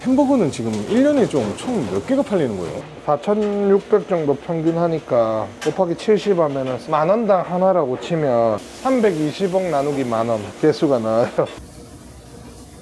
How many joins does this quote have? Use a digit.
4